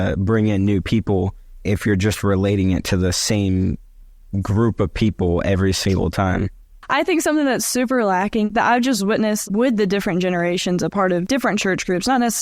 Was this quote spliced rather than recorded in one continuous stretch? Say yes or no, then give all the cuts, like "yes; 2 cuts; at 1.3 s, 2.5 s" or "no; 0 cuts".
yes; 4 cuts; at 6.8 s, 8.5 s, 9.4 s, 11.2 s